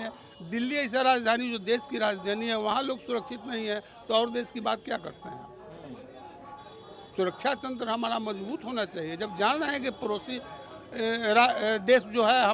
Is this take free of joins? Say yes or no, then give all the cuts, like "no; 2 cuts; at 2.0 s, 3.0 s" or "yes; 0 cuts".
yes; 0 cuts